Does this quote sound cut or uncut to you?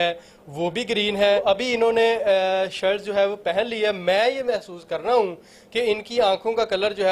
cut